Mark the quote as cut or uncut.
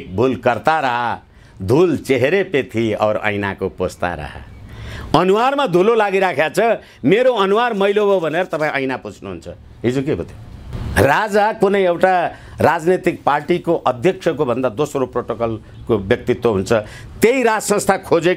uncut